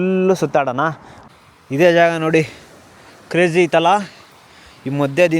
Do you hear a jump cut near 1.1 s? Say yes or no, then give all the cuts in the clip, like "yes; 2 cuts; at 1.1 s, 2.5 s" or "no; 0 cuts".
yes; 1 cut; at 1.1 s